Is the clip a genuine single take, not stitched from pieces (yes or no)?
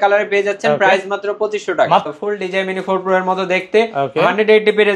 no